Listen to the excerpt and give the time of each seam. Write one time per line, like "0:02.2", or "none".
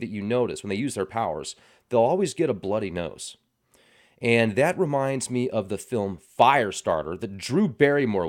none